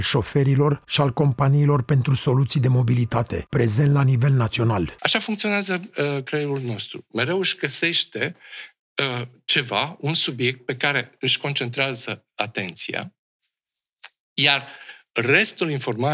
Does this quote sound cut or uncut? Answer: cut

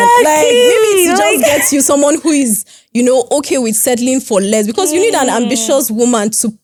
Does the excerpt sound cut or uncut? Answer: uncut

